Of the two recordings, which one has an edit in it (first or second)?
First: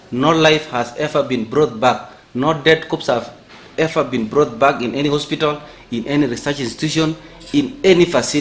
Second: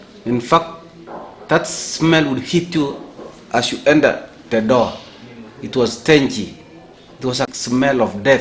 second